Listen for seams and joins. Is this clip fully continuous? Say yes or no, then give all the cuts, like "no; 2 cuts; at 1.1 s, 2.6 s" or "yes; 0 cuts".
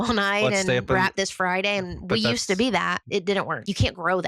no; 1 cut; at 3.0 s